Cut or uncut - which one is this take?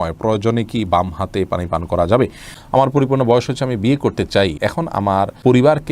cut